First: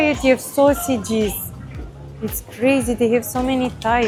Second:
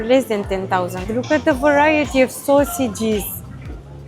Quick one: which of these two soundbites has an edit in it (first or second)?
second